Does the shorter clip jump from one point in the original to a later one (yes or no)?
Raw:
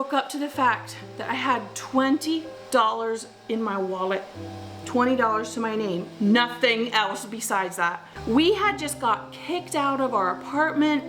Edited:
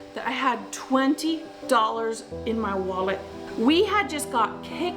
yes